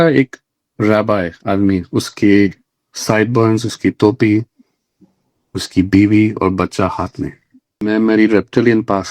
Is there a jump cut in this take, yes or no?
yes